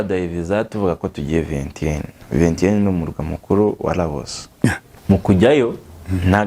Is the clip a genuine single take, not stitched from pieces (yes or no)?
no